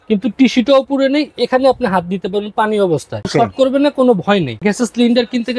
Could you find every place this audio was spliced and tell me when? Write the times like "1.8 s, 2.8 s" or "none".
3.3 s, 4.6 s